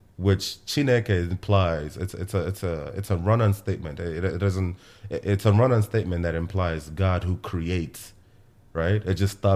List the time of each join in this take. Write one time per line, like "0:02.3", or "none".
none